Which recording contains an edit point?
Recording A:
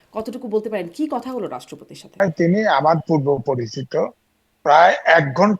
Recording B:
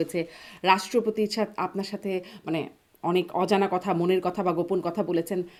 A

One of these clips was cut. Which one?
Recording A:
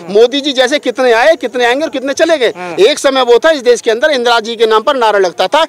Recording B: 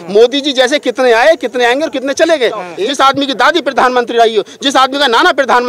B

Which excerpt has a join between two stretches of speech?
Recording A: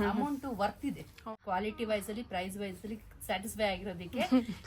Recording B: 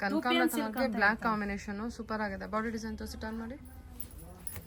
A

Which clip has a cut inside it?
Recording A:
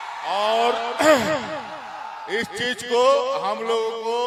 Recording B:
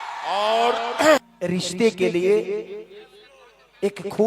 B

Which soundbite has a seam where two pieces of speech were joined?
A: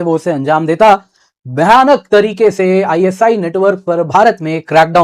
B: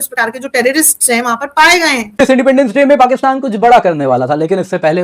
B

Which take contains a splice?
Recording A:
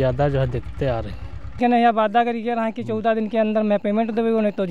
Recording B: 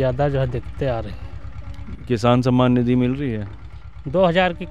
A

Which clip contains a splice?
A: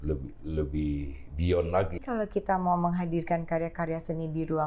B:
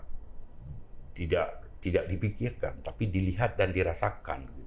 A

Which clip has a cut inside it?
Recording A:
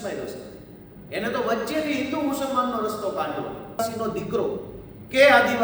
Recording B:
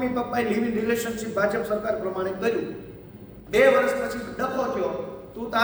A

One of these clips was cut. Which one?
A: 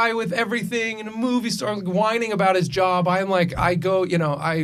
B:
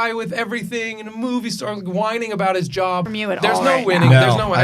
B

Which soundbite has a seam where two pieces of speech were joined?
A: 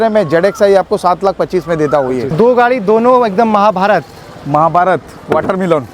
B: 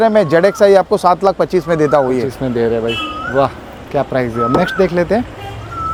A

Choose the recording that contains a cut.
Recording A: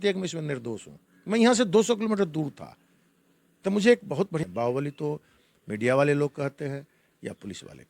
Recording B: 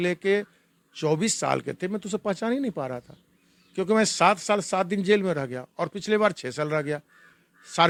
A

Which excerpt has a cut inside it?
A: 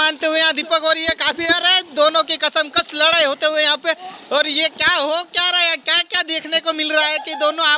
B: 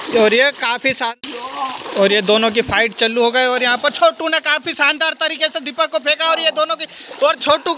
B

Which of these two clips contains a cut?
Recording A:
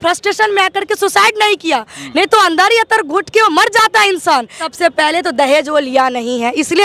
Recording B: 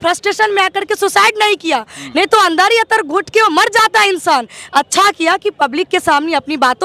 A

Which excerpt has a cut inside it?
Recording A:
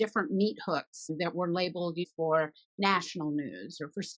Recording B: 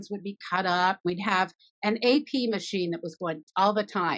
B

